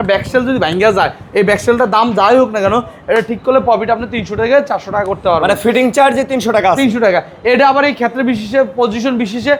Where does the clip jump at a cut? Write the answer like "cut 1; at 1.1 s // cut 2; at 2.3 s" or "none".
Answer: none